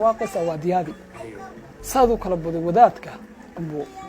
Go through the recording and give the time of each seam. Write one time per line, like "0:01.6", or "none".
0:01.7